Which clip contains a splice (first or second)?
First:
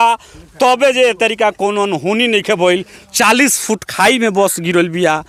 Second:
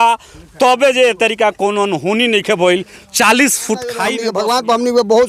second